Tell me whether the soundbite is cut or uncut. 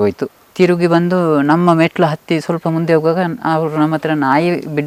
uncut